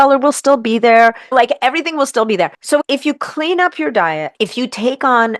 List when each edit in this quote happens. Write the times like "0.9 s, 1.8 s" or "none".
1.2 s, 2.6 s, 4.3 s